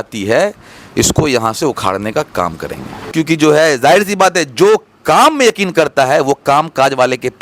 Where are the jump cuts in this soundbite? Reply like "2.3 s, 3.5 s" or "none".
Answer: 3.1 s